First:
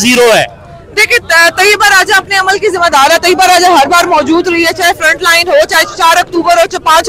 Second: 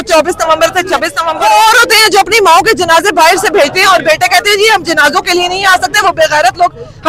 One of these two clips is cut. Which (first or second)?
second